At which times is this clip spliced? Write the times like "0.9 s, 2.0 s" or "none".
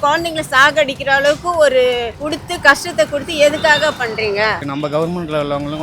2.1 s, 4.7 s